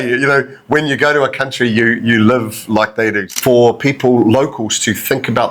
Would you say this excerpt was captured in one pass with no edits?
no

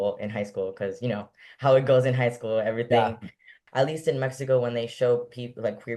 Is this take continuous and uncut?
no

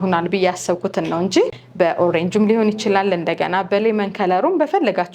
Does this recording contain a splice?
yes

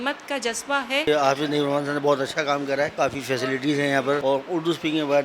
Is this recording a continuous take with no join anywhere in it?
no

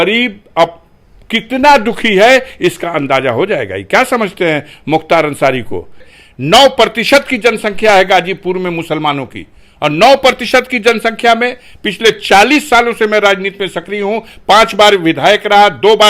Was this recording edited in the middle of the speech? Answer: yes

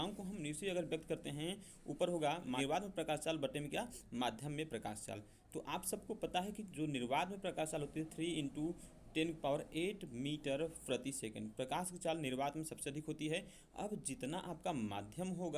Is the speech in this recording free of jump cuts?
no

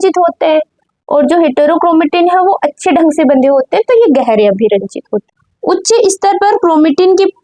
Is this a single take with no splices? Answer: no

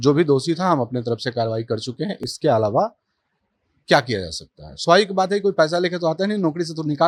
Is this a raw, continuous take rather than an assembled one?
yes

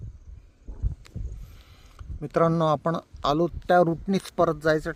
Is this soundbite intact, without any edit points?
yes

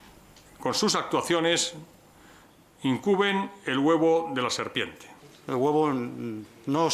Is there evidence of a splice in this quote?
yes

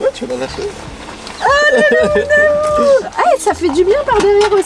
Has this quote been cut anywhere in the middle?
no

